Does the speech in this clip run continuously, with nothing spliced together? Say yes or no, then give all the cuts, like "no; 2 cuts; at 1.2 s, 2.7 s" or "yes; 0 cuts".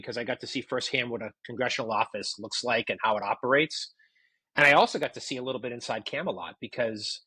yes; 0 cuts